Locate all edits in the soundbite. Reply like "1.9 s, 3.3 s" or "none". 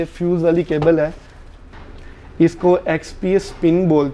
1.6 s